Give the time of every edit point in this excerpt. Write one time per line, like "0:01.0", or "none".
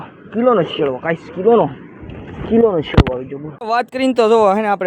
0:03.6